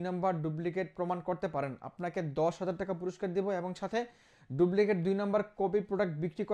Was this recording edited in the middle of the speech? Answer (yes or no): no